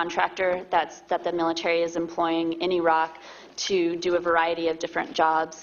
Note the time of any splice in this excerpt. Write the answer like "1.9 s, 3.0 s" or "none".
3.9 s

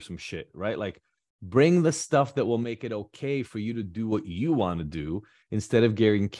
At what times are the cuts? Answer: none

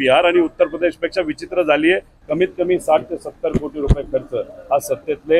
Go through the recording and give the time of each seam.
2.1 s

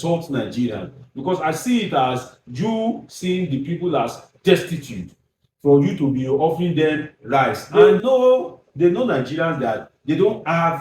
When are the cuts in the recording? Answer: 7.6 s

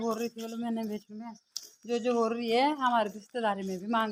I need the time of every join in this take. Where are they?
none

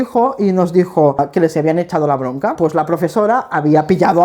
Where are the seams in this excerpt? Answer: 1.2 s, 2.5 s

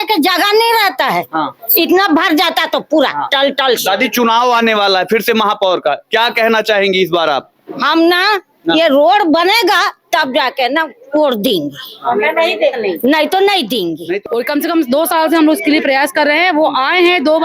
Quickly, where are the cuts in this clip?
14.1 s

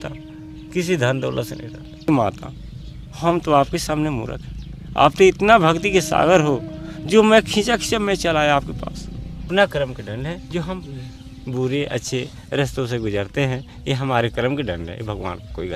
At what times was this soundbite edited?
2.1 s, 9.5 s

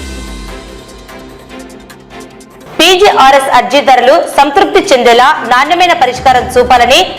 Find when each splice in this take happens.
2.2 s

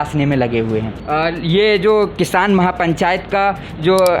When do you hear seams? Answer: 0.9 s

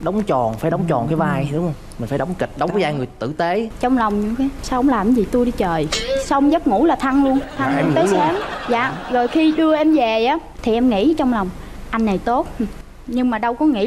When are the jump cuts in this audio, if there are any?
3.7 s

